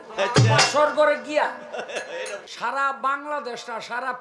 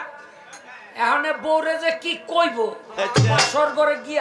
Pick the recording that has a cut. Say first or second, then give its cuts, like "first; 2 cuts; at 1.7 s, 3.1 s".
first; 1 cut; at 2.4 s